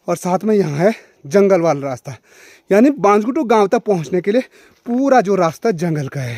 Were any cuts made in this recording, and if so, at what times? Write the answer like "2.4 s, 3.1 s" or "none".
none